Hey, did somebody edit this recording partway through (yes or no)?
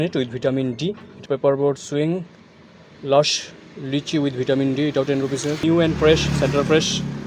yes